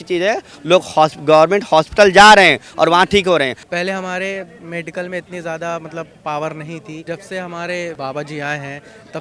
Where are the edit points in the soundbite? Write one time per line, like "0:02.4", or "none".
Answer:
0:03.6
0:07.0
0:08.0